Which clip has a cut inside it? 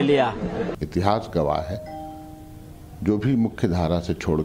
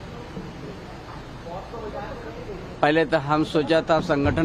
first; 1 cut; at 3.3 s

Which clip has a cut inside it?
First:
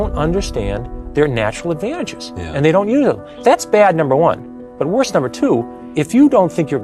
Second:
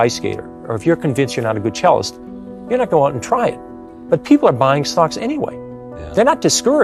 first; 2 cuts; at 3.3 s, 5.8 s

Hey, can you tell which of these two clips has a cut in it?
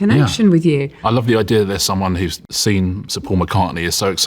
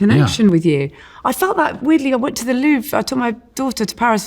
first; 2 cuts; at 0.9 s, 2.5 s

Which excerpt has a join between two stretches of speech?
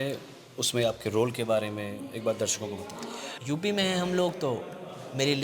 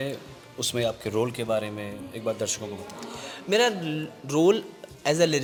first; 1 cut; at 3.3 s

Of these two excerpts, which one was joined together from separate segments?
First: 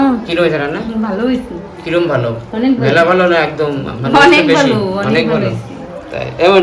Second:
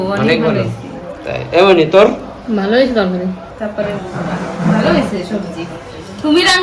second; 1 cut; at 3.5 s

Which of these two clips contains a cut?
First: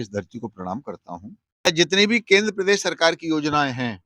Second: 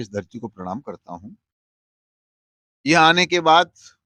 first; 1 cut; at 1.7 s

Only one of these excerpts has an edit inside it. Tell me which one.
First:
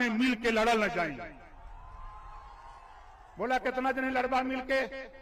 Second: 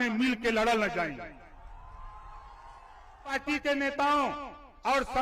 second; 1 cut; at 3.3 s

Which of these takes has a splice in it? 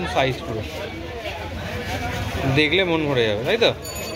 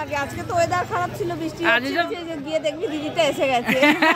second; 1 cut; at 2.1 s

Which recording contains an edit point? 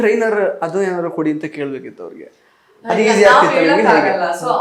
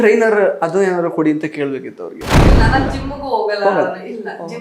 second; 1 cut; at 2.4 s

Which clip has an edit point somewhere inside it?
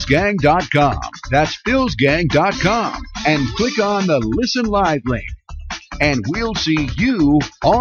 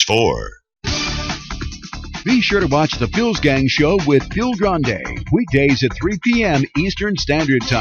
second; 1 cut; at 1.0 s

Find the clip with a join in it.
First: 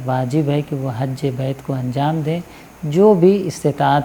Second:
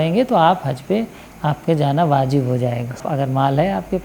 second; 1 cut; at 3.0 s

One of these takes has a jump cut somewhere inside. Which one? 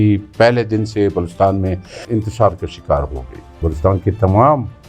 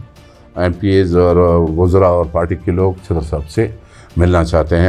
first; 2 cuts; at 2.0 s, 3.7 s

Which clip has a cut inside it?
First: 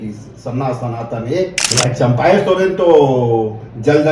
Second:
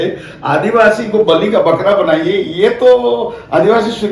first; 1 cut; at 1.7 s

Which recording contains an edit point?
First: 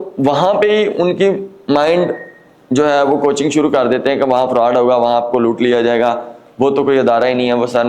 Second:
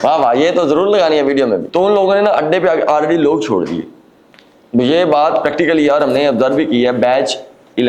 second; 1 cut; at 1.7 s

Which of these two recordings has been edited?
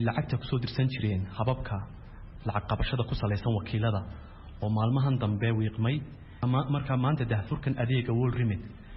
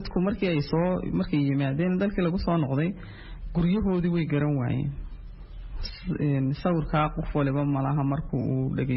first; 1 cut; at 6.4 s

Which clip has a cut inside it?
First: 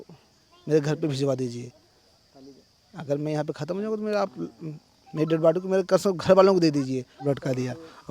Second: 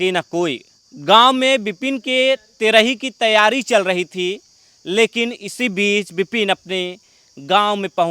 first; 1 cut; at 7.2 s

